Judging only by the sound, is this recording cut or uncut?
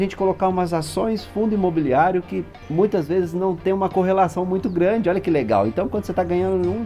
uncut